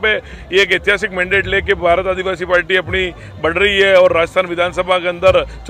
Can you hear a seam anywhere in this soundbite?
no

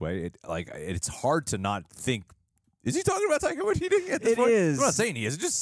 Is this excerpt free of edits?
yes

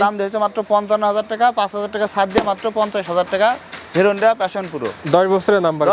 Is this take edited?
no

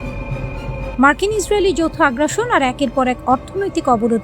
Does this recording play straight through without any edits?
no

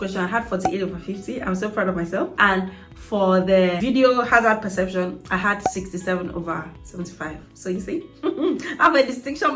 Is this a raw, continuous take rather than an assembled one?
no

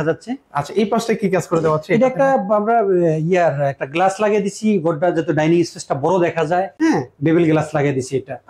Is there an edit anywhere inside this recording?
no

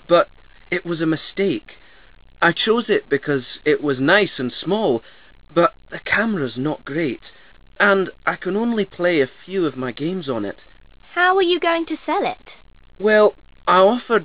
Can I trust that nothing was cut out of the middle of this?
yes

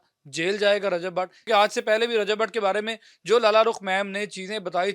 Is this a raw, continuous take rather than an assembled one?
no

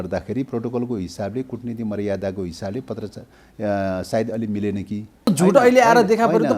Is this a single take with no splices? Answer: no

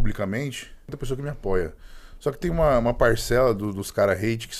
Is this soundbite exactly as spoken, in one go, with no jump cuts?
no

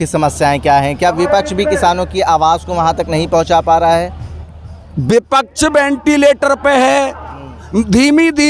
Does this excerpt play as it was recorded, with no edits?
yes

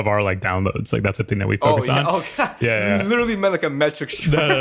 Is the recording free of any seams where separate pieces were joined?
yes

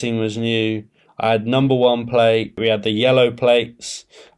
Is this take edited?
yes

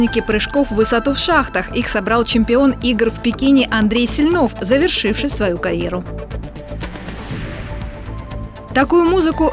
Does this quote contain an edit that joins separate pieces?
no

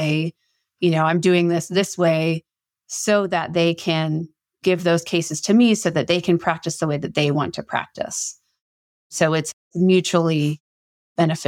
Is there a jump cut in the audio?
yes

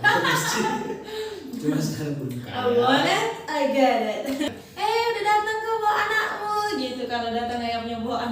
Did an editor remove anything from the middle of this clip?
yes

